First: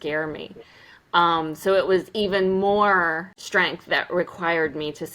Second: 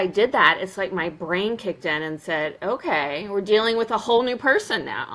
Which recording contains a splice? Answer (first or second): first